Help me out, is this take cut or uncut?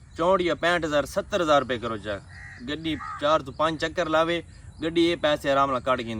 uncut